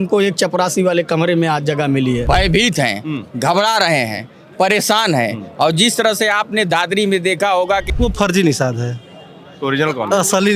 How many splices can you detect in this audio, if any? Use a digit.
2